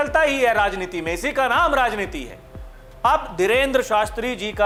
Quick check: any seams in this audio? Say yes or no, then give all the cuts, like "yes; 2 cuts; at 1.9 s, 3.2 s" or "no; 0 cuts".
no; 0 cuts